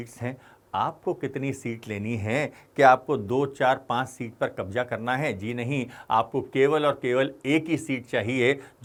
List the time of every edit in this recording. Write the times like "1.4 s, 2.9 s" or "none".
none